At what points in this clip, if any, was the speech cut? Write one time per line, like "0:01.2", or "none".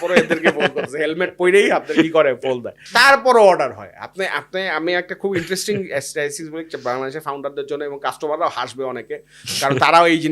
none